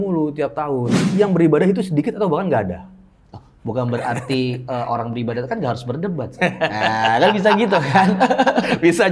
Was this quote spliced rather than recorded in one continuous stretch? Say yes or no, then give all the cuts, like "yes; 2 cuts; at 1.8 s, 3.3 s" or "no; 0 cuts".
yes; 1 cut; at 1.0 s